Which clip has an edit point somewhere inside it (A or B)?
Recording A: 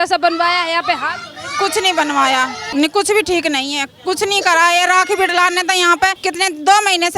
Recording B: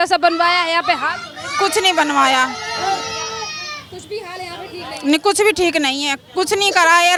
A